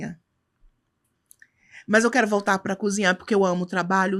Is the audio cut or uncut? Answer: uncut